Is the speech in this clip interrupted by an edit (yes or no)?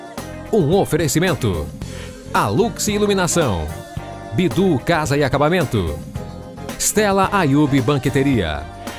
no